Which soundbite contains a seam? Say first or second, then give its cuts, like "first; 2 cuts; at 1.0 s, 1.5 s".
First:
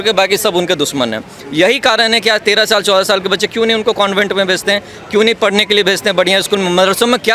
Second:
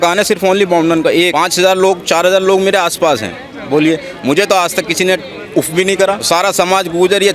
second; 2 cuts; at 1.3 s, 6.2 s